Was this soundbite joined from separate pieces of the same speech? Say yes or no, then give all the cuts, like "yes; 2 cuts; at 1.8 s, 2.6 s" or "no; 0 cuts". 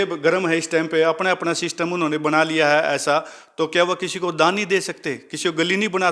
no; 0 cuts